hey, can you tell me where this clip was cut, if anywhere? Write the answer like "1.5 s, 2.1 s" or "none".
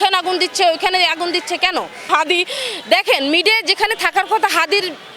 2.1 s